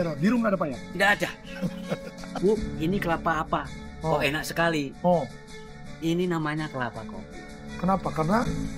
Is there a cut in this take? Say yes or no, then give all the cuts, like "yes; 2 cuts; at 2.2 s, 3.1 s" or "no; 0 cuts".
yes; 1 cut; at 2.2 s